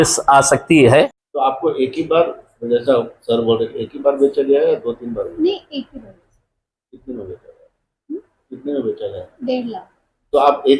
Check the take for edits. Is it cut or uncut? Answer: cut